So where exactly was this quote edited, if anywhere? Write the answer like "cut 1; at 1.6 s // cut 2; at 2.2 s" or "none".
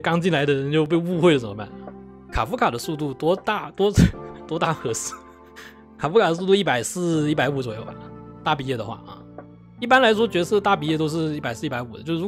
none